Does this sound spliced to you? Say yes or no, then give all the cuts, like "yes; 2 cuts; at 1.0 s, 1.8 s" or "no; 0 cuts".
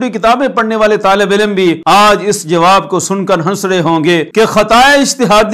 yes; 2 cuts; at 1.8 s, 4.3 s